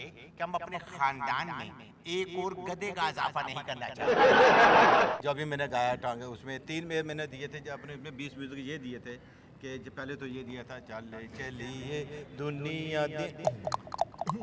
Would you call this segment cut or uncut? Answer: cut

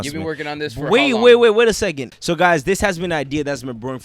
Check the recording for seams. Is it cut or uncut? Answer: cut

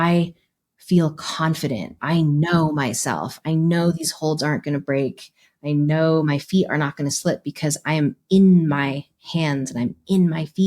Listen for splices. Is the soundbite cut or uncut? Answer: cut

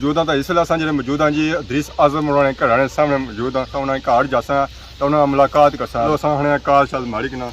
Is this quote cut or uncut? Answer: cut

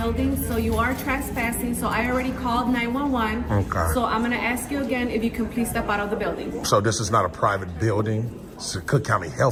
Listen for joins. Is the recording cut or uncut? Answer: uncut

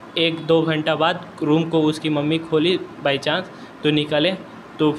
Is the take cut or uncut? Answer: uncut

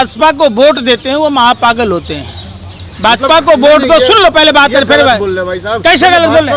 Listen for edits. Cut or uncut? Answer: uncut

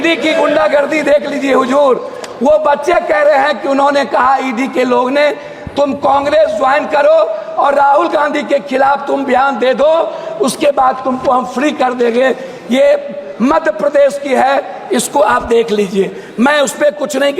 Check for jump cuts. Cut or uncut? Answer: uncut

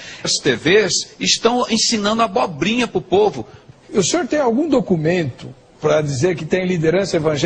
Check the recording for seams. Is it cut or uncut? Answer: uncut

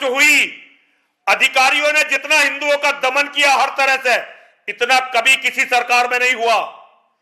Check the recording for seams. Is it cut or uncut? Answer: uncut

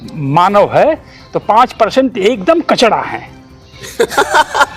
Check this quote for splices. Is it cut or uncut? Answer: uncut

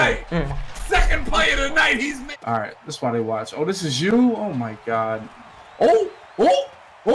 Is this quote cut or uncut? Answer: cut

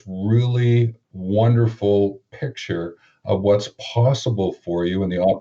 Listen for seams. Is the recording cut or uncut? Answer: cut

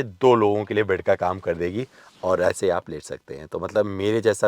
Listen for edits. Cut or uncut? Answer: uncut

